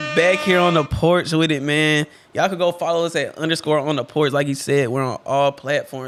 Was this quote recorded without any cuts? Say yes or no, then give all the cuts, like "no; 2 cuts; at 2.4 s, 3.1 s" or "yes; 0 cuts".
yes; 0 cuts